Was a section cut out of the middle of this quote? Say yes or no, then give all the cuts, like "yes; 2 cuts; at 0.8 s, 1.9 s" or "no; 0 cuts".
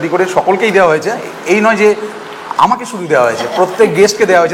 no; 0 cuts